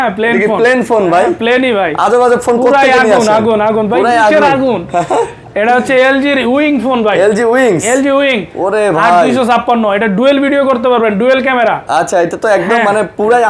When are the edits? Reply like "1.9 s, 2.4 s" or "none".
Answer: none